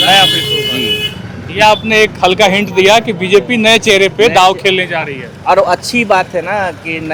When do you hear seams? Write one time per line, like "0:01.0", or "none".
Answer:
none